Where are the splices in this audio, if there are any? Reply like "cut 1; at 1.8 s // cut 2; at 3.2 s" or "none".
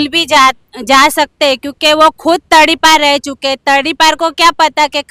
none